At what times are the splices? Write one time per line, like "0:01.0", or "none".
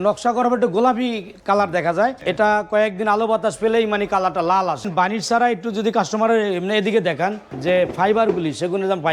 0:02.2
0:04.9
0:07.5